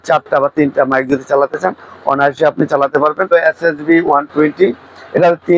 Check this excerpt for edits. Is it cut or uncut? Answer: cut